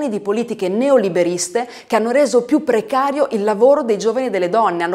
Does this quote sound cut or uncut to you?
uncut